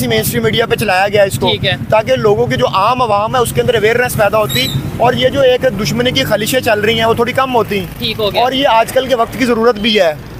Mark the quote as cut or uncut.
uncut